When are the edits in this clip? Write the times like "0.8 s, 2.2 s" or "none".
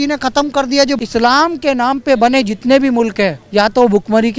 1.0 s, 3.4 s